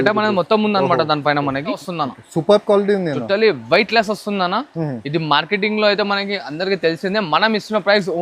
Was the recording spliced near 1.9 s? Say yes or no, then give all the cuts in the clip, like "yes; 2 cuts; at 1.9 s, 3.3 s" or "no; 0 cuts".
yes; 1 cut; at 1.9 s